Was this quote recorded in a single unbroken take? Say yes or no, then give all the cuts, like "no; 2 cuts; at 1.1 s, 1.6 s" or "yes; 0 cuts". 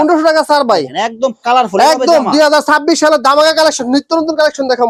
yes; 0 cuts